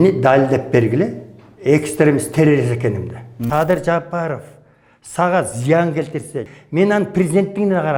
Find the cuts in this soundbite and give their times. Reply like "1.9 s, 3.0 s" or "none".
3.4 s, 6.4 s